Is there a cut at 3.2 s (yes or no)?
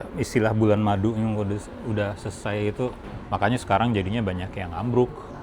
yes